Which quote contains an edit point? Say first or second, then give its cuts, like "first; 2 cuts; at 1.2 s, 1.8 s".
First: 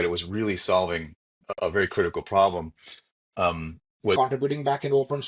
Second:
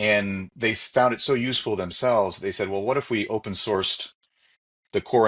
first; 1 cut; at 4.2 s